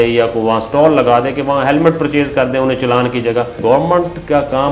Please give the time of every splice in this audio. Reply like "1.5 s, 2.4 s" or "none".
3.6 s